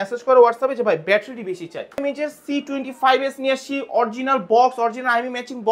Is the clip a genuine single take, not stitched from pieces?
no; 1 cut; at 2.0 s

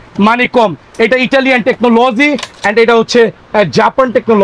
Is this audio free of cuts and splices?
yes; 0 cuts

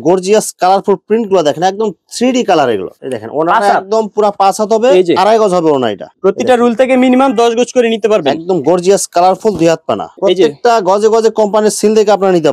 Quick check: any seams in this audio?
yes; 3 cuts; at 3.0 s, 6.1 s, 10.1 s

